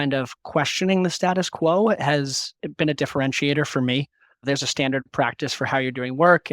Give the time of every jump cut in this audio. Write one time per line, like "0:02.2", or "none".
0:02.6
0:04.4